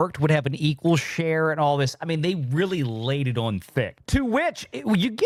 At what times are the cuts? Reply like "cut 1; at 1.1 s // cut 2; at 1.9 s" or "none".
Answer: none

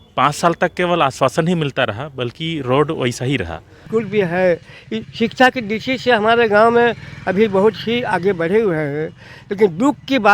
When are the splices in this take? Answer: cut 1; at 3.8 s

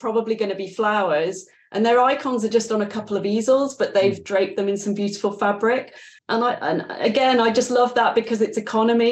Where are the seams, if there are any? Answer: cut 1; at 6.1 s

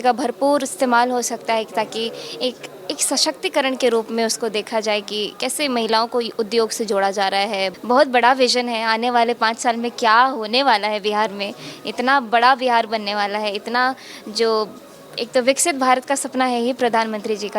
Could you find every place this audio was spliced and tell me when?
cut 1; at 7.7 s

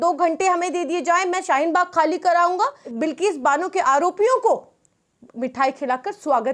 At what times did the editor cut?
cut 1; at 2.9 s

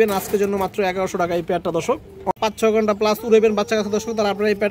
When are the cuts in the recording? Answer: cut 1; at 2.3 s

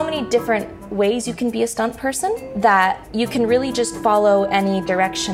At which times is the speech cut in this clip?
cut 1; at 2.5 s // cut 2; at 3.0 s

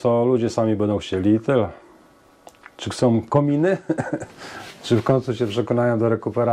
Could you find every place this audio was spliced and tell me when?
none

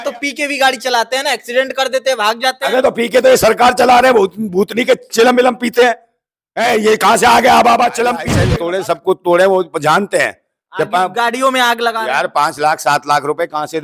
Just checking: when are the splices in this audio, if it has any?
cut 1; at 8.4 s

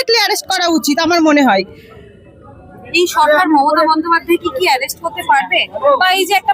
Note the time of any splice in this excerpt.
none

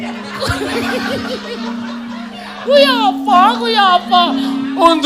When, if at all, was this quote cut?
cut 1; at 3.0 s

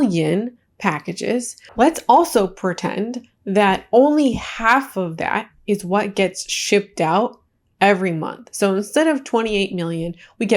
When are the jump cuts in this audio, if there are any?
cut 1; at 1.7 s

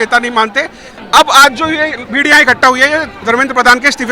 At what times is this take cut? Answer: cut 1; at 0.9 s

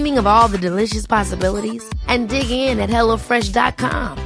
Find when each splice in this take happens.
none

